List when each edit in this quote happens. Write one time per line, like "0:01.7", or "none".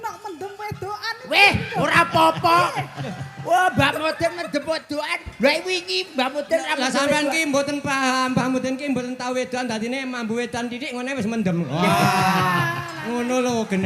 none